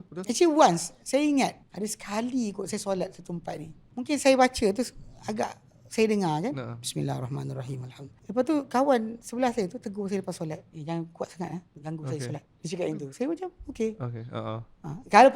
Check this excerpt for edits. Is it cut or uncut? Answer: cut